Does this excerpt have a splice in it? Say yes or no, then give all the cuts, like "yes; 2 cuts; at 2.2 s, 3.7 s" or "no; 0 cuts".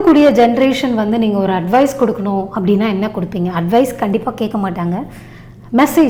no; 0 cuts